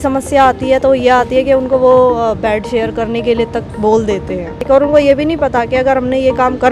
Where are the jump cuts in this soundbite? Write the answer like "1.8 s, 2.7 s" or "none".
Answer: 4.6 s